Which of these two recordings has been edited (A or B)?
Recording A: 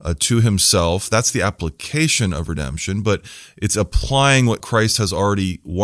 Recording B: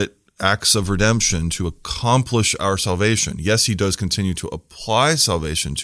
A